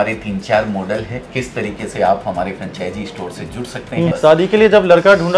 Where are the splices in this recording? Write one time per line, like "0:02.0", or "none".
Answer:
0:01.2
0:04.1